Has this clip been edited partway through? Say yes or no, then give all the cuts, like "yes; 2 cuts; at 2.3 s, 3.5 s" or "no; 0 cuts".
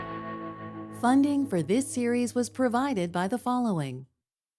yes; 1 cut; at 0.9 s